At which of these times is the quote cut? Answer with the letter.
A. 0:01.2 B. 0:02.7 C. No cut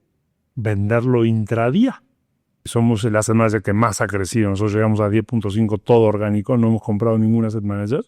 B